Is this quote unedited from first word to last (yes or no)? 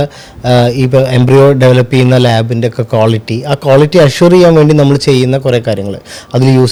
yes